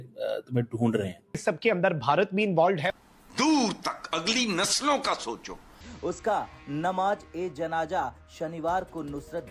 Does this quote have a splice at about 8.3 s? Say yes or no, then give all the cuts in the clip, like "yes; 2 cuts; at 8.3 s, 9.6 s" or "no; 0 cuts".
no; 2 cuts; at 1.3 s, 5.9 s